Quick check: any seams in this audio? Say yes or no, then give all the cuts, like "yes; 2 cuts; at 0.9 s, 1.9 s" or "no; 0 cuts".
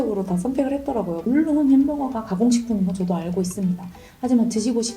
yes; 1 cut; at 1.2 s